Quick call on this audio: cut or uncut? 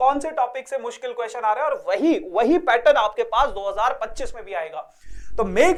uncut